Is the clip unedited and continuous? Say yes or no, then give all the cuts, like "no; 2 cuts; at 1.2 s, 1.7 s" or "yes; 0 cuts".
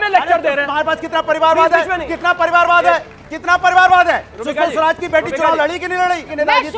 yes; 0 cuts